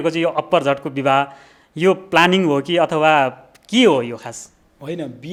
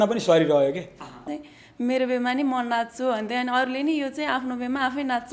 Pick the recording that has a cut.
second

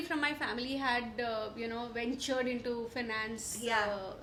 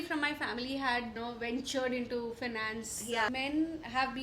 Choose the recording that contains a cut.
second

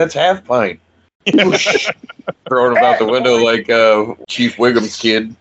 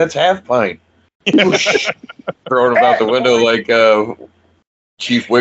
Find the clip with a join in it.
first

